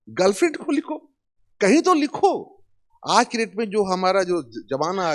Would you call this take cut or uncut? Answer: uncut